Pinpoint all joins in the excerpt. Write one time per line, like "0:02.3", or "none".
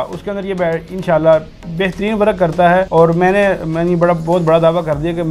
0:02.9